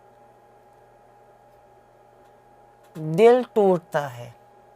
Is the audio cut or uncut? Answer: uncut